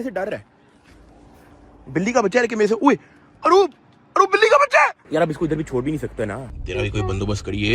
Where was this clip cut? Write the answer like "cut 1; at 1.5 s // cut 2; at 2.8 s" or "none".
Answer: cut 1; at 5.0 s // cut 2; at 6.4 s